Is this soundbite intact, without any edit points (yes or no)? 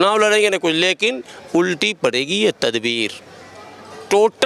yes